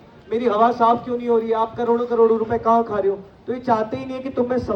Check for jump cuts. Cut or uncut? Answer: uncut